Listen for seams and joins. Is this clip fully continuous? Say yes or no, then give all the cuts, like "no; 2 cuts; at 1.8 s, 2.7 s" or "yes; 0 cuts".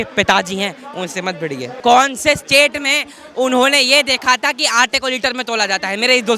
no; 1 cut; at 1.7 s